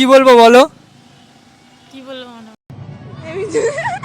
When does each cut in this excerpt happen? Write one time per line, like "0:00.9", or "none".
0:02.6